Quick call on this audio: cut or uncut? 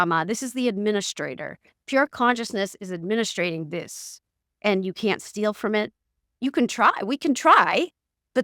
uncut